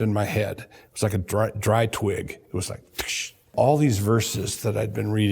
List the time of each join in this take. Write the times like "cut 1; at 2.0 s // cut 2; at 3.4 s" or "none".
cut 1; at 3.5 s